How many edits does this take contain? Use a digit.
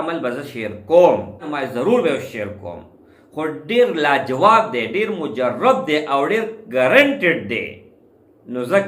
1